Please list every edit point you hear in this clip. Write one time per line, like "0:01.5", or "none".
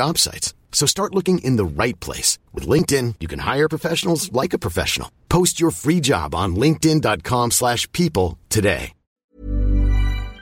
0:09.3